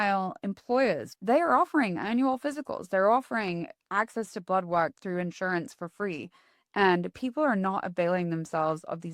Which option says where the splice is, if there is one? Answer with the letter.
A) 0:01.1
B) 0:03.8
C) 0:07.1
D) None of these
A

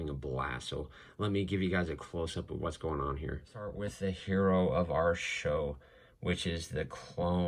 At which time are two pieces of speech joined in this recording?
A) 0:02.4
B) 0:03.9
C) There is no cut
B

